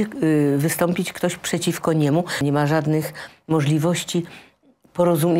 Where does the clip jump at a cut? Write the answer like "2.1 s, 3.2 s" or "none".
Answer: 2.4 s